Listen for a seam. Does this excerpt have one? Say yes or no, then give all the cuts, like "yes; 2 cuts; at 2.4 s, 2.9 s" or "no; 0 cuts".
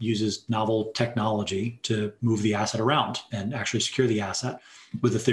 yes; 2 cuts; at 2.2 s, 3.3 s